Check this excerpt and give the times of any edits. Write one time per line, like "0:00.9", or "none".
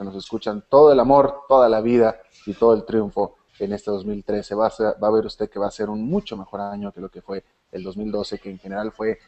none